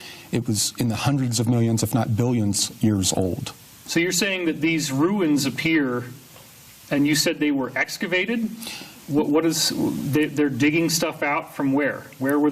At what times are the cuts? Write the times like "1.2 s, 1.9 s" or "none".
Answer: 4.4 s